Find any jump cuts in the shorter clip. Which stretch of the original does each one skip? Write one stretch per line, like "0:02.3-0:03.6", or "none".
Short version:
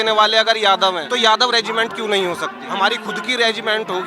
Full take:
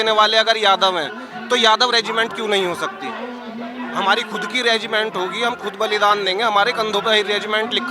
0:01.1-0:01.5
0:03.0-0:03.9